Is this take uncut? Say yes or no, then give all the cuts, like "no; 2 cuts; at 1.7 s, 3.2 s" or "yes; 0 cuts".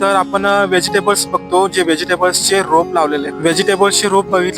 no; 1 cut; at 3.3 s